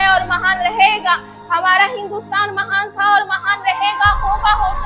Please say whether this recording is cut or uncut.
uncut